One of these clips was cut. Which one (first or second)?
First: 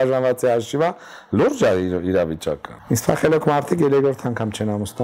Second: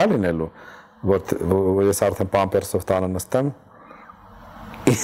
first